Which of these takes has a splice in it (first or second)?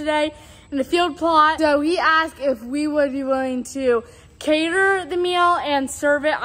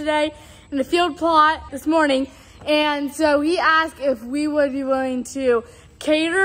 first